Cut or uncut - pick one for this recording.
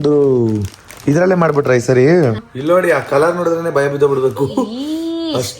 cut